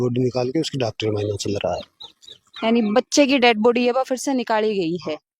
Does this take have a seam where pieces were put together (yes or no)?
no